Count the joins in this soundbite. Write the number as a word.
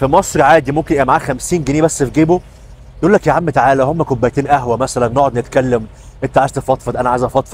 zero